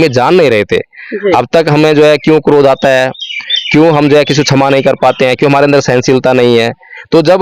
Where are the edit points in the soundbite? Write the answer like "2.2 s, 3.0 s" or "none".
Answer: none